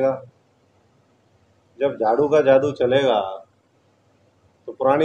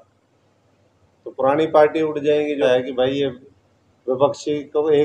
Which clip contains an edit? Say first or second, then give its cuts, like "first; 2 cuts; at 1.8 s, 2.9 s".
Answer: second; 1 cut; at 2.6 s